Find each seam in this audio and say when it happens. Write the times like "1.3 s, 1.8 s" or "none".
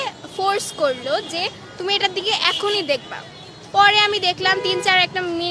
none